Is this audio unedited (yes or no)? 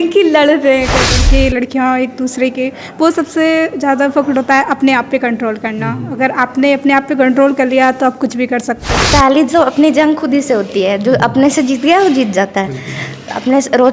no